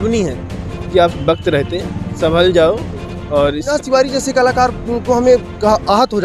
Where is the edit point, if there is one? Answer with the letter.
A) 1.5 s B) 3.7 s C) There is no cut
B